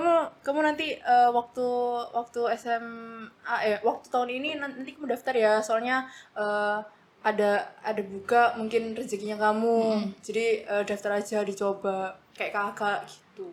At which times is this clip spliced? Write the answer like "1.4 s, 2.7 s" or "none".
none